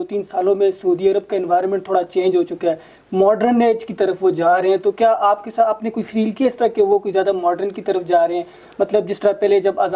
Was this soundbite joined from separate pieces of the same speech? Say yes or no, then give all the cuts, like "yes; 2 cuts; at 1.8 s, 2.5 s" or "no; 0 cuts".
no; 0 cuts